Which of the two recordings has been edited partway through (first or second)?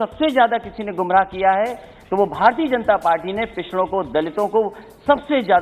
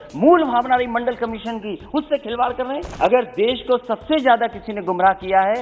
second